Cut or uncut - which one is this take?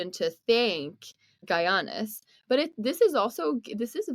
cut